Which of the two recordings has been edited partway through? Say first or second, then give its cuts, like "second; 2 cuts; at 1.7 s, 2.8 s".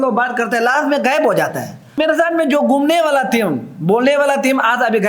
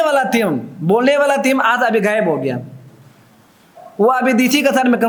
first; 1 cut; at 2.0 s